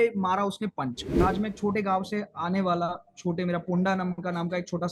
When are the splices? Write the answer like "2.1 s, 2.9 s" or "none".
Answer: 1.1 s